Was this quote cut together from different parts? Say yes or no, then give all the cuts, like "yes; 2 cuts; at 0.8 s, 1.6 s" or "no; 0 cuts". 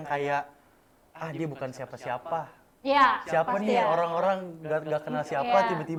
no; 0 cuts